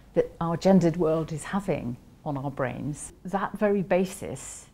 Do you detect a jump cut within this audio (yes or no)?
yes